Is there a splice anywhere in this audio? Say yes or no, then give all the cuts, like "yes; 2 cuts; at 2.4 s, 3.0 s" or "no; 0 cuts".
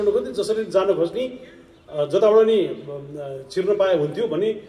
no; 0 cuts